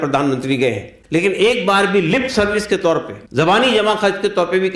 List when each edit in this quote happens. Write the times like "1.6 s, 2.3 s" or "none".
0.9 s, 3.2 s